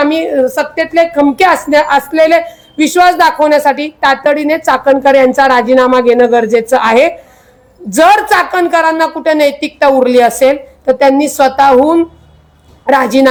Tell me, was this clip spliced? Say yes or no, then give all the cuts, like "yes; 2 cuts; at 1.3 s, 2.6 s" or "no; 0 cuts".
no; 0 cuts